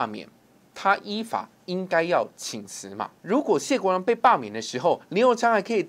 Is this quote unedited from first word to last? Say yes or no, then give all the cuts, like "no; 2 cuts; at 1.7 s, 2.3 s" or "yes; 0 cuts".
no; 1 cut; at 3.1 s